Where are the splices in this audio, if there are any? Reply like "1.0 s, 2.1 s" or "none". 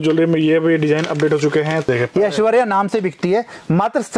1.9 s